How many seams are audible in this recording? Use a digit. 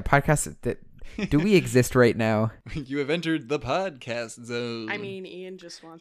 1